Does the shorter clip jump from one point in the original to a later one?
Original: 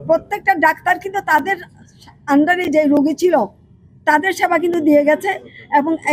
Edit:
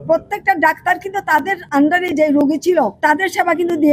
yes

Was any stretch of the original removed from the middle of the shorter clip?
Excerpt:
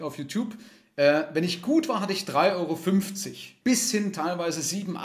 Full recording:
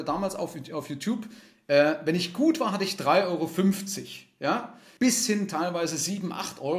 yes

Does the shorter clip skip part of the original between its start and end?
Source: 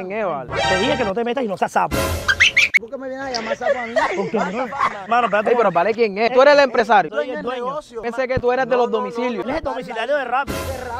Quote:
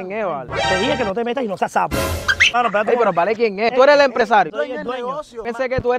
yes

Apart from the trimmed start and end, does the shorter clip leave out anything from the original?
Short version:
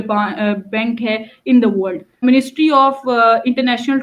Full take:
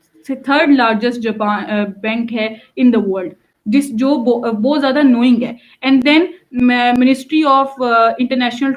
yes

